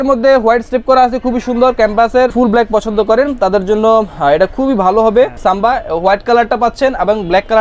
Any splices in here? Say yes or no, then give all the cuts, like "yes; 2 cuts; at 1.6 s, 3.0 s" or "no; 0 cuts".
yes; 2 cuts; at 2.3 s, 5.4 s